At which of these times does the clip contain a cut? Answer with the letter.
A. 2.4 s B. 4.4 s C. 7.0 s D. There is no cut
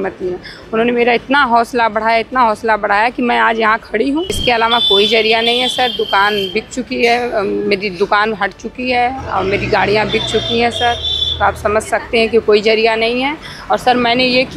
B